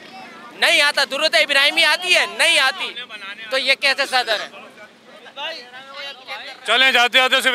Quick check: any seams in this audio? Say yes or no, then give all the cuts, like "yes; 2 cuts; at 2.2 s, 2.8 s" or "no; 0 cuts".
no; 0 cuts